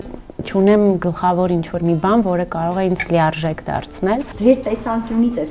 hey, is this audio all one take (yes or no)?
no